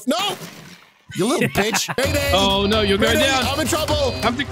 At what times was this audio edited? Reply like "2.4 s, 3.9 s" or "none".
2.0 s